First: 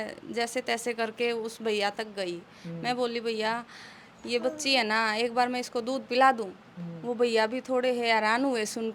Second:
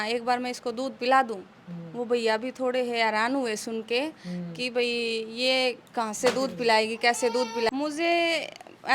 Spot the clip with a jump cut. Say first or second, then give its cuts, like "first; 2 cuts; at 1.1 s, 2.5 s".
second; 1 cut; at 7.7 s